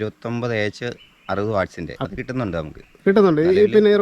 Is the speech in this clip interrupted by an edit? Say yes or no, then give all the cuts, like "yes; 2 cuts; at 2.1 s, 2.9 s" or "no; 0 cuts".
yes; 1 cut; at 2.0 s